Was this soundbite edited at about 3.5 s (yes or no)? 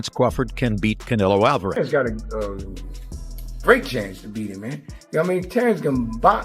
no